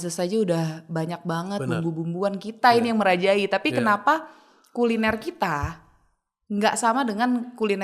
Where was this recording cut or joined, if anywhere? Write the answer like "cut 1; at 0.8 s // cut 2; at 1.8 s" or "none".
none